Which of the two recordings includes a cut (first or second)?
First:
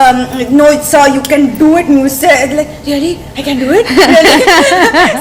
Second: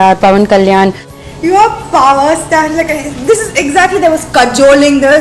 second